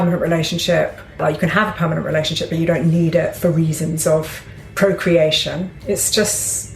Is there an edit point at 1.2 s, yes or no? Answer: yes